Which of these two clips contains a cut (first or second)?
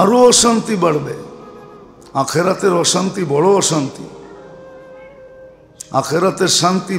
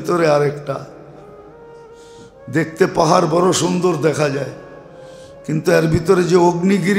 first